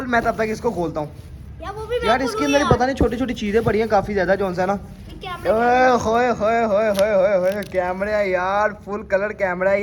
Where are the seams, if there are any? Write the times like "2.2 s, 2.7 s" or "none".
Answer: none